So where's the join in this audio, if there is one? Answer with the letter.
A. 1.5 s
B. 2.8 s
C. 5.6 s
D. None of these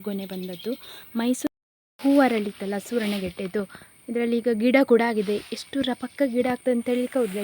A